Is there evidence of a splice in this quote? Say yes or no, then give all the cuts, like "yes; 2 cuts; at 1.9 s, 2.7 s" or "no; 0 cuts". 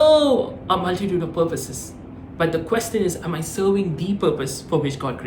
no; 0 cuts